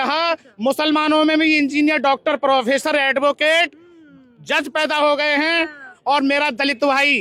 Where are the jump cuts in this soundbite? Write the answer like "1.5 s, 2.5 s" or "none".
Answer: 5.9 s